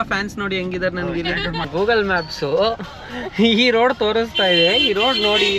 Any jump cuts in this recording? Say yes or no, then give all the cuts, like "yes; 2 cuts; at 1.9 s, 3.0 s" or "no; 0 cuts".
yes; 1 cut; at 1.7 s